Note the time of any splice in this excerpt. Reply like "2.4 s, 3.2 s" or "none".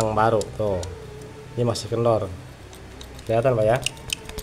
3.2 s